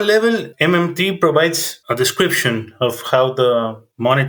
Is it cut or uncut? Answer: uncut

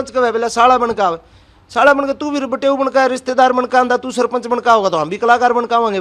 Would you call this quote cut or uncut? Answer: uncut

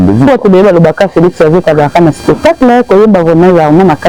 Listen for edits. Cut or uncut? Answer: uncut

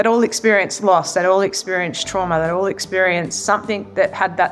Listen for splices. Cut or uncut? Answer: uncut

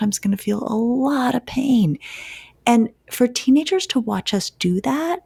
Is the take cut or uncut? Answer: uncut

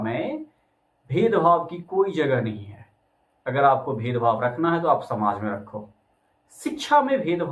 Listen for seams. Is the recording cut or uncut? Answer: uncut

